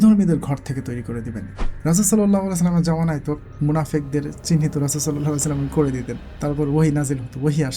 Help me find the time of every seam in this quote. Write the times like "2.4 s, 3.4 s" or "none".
1.7 s